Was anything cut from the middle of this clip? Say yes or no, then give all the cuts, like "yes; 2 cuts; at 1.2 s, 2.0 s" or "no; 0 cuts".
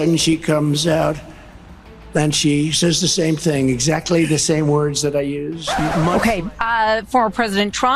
yes; 1 cut; at 5.6 s